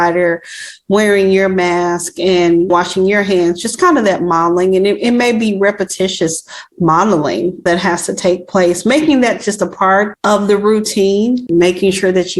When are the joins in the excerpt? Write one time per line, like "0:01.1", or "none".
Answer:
0:10.1
0:11.5